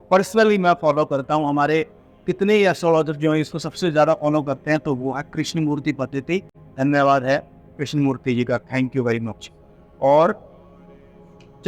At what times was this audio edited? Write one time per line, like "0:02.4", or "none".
none

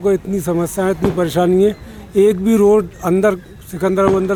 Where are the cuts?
none

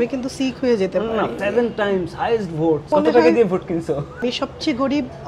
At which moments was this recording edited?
0:01.4
0:02.9
0:04.2

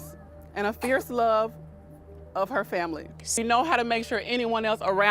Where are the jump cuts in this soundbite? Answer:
0:03.2

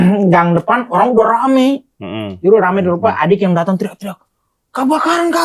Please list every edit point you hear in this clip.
none

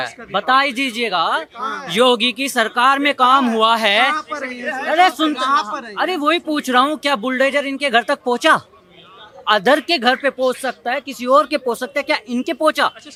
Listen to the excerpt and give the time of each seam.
none

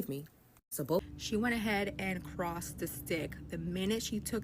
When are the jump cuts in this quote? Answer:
0:01.0

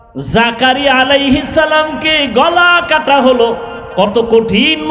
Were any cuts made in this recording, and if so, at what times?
none

